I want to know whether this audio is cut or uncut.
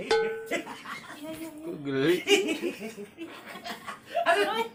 uncut